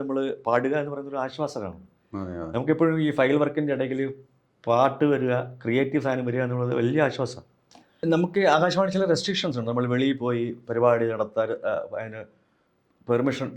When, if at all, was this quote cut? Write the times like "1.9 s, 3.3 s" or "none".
8.1 s

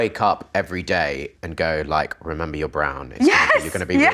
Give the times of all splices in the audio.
1.4 s

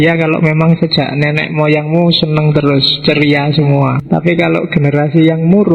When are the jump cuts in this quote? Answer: 4.0 s

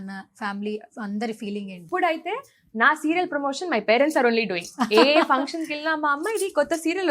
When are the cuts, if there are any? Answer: 1.9 s

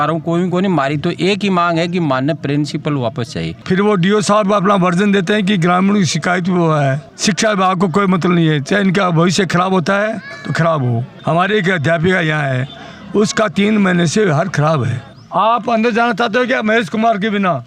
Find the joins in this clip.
3.5 s, 7.1 s, 11.1 s, 15.1 s

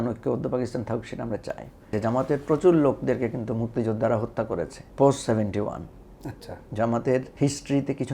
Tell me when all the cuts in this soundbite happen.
1.9 s, 4.8 s, 7.3 s

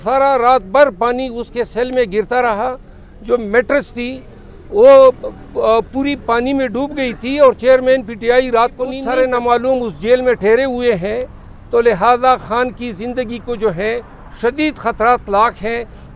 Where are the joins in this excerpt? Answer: 9.0 s

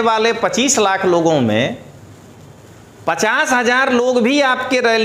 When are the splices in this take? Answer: none

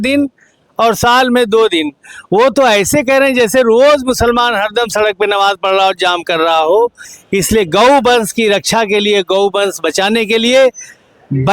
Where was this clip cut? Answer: 7.1 s

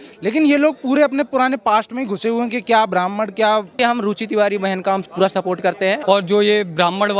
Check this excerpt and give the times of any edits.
3.8 s, 6.0 s

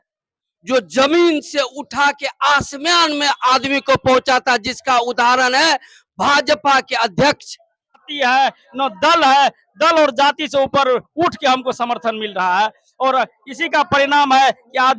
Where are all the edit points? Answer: 8.1 s

